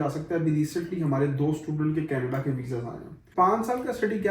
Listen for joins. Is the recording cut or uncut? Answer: cut